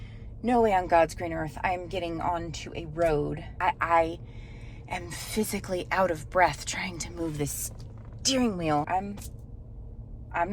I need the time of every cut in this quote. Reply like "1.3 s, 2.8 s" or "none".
3.5 s, 8.9 s